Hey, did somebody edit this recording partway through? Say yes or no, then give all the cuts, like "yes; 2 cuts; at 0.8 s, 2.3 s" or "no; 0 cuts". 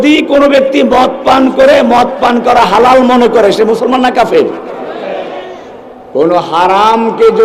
no; 0 cuts